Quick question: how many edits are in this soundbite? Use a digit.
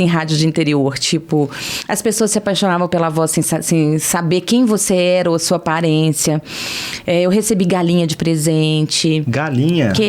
0